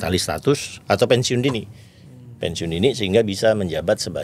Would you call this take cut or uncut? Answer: uncut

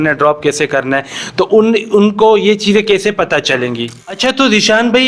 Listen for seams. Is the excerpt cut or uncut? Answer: cut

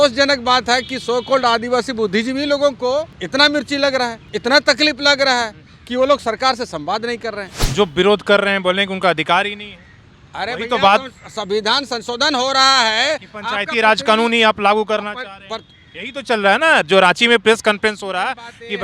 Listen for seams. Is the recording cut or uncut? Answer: cut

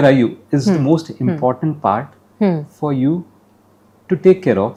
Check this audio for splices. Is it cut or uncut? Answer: uncut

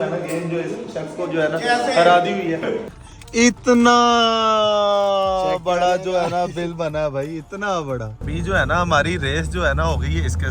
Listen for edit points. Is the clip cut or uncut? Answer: cut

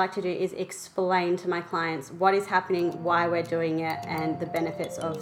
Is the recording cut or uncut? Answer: uncut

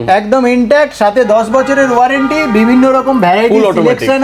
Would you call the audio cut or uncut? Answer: uncut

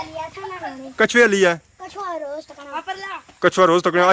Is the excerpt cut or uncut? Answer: cut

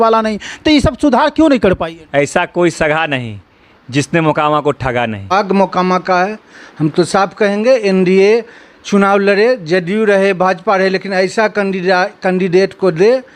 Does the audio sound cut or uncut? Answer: cut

